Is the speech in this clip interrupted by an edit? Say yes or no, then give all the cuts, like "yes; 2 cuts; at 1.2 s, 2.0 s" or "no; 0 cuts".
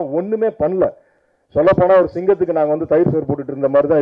yes; 1 cut; at 1.1 s